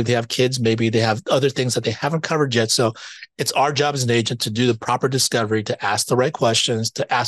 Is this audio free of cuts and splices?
yes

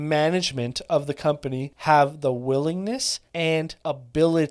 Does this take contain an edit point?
yes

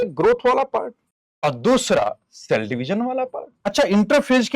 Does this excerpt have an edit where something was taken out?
yes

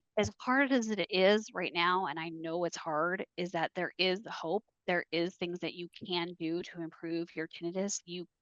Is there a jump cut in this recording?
no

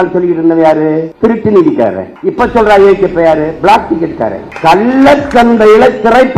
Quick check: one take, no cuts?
no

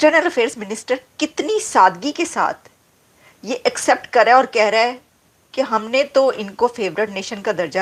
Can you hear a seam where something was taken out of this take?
no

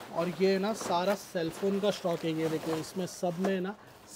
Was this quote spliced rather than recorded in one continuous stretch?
no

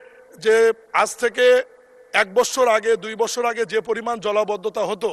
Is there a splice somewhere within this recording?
no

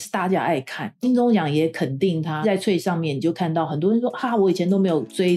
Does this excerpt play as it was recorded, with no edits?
no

